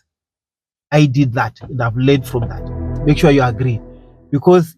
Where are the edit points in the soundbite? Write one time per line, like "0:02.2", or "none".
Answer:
0:02.9